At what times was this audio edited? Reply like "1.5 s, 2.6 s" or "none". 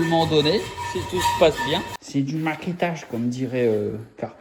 2.0 s